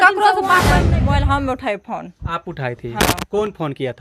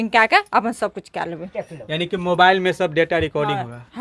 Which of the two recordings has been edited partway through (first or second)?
first